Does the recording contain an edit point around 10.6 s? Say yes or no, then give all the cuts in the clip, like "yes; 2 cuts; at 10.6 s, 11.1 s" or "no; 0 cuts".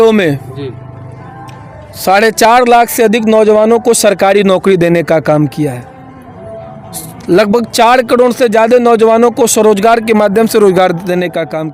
no; 0 cuts